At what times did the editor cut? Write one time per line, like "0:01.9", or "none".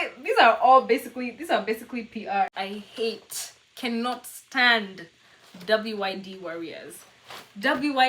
0:02.5